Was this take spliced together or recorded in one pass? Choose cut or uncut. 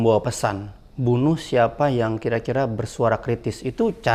uncut